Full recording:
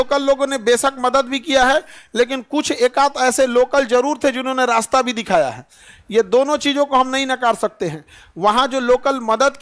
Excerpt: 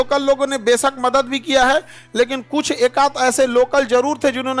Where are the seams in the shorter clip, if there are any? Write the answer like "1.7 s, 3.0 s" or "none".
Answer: none